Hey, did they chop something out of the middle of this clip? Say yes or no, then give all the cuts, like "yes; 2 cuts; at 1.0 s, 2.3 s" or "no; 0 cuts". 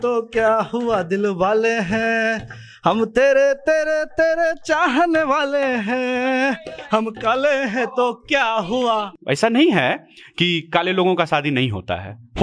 yes; 1 cut; at 9.1 s